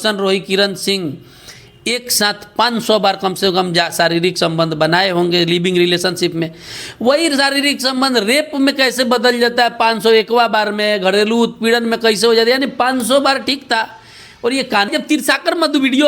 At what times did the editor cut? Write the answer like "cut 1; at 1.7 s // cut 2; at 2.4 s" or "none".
cut 1; at 14.9 s